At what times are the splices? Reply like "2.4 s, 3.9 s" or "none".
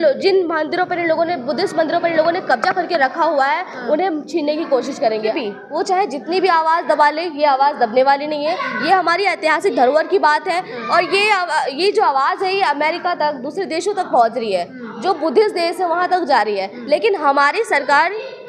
5.2 s